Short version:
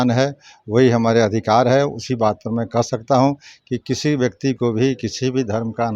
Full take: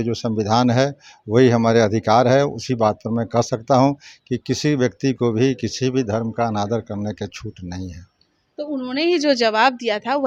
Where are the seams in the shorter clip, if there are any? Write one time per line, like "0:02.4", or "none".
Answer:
none